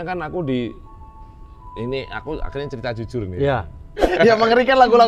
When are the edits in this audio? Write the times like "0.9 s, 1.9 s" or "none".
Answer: 4.0 s